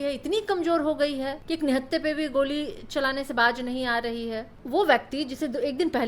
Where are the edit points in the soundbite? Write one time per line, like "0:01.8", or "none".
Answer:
0:01.4
0:04.5